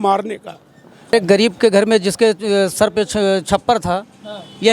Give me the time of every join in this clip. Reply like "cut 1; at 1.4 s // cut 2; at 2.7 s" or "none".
cut 1; at 1.1 s